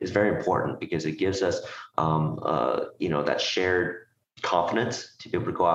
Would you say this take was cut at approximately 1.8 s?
no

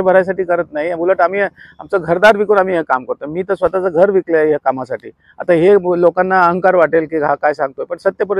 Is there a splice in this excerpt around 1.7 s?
no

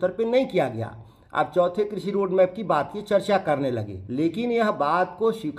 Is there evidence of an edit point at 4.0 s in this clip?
yes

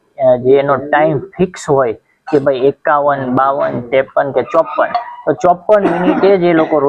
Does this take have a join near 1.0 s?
no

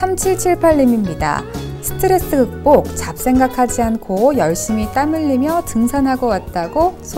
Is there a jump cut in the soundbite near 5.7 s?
no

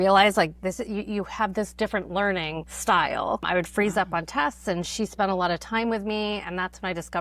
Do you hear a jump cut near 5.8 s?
no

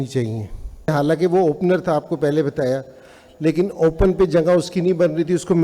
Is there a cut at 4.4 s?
no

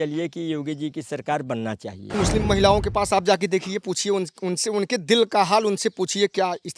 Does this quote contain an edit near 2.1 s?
yes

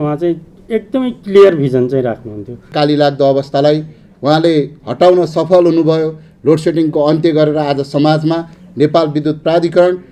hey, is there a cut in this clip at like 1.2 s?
no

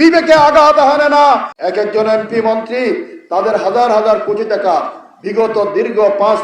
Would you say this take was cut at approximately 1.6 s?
yes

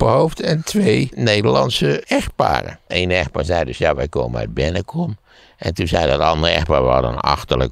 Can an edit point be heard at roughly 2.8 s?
yes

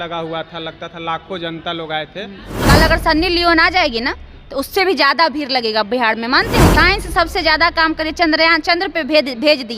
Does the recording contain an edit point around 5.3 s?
no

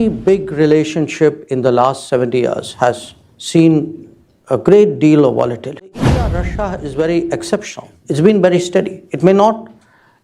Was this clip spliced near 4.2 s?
no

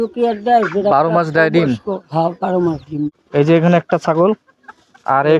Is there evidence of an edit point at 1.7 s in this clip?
no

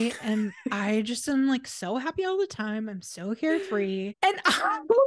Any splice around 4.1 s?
yes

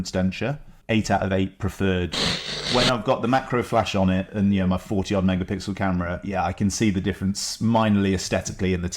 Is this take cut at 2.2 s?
yes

